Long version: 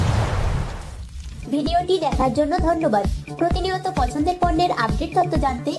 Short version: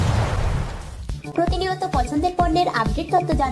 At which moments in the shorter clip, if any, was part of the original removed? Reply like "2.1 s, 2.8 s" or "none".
1.2 s